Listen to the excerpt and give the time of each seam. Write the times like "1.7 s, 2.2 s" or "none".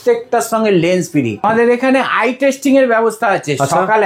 1.3 s